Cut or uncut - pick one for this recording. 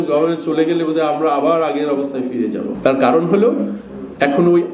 cut